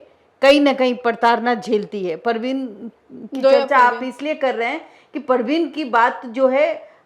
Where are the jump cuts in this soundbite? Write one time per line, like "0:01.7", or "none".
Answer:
none